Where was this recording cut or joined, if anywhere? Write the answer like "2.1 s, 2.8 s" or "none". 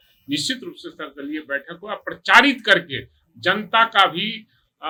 none